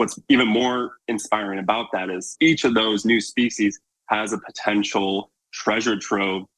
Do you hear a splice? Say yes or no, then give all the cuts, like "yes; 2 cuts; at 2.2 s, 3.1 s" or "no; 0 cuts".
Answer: yes; 2 cuts; at 1.0 s, 2.3 s